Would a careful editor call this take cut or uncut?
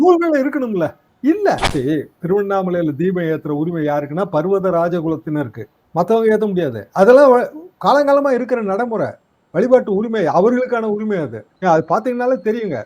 cut